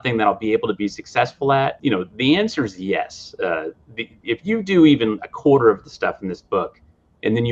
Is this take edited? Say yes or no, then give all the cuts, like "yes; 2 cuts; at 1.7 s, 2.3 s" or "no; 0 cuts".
yes; 1 cut; at 1.8 s